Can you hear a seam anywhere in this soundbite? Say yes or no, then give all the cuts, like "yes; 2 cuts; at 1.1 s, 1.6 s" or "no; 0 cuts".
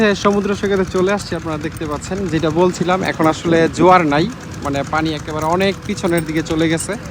no; 0 cuts